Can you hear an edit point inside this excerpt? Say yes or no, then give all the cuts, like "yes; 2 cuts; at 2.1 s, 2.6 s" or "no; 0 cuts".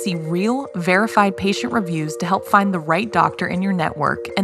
no; 0 cuts